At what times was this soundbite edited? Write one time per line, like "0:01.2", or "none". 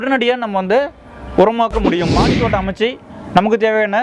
0:02.3